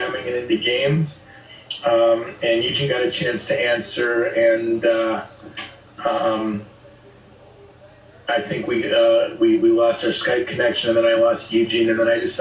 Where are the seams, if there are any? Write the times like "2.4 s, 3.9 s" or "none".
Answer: 10.0 s